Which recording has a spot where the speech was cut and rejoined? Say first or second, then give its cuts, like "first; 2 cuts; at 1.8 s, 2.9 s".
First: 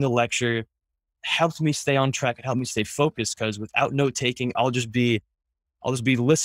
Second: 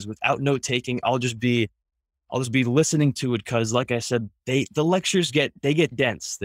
first; 1 cut; at 1.1 s